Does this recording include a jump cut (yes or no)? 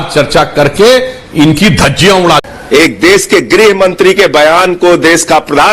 yes